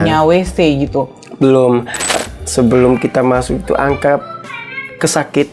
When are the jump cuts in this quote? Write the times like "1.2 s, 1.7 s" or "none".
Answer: 2.1 s